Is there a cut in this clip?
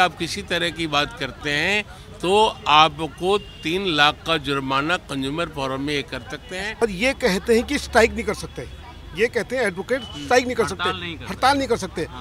yes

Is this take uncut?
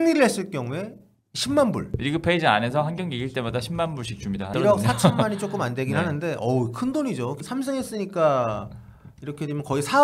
no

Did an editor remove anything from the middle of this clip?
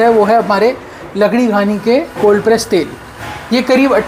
no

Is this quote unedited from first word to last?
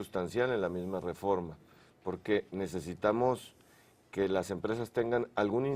yes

